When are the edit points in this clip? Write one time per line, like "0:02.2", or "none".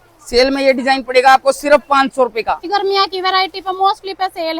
0:02.7